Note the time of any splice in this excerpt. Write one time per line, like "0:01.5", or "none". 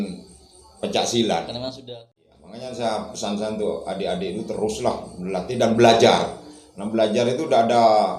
0:01.9